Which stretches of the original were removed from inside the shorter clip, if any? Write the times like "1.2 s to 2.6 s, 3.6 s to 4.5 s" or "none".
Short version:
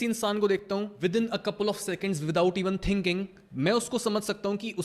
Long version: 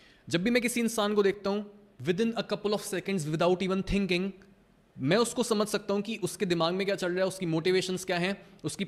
1.7 s to 2.0 s, 4.4 s to 4.8 s